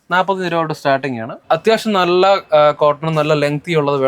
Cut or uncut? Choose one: cut